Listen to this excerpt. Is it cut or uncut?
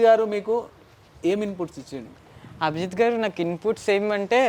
uncut